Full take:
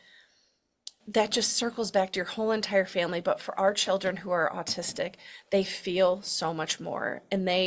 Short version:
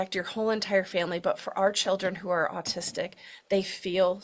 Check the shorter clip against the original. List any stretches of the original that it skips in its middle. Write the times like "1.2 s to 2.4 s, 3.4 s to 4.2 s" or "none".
none